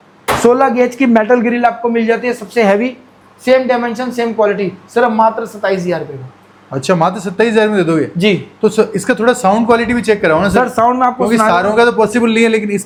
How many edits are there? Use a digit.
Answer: 0